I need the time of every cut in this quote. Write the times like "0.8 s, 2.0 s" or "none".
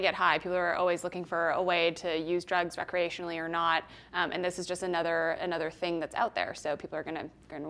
none